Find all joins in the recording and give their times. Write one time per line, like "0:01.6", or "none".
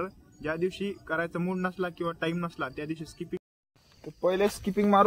0:03.4